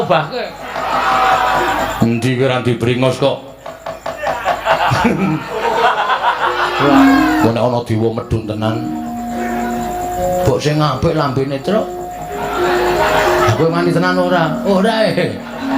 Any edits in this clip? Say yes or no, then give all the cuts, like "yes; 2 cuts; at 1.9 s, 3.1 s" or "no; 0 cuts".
yes; 1 cut; at 6.9 s